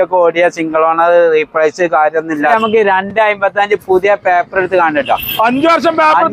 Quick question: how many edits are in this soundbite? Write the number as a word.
one